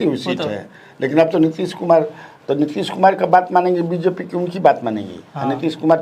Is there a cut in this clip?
no; 0 cuts

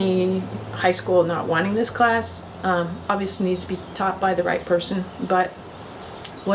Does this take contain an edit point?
no; 0 cuts

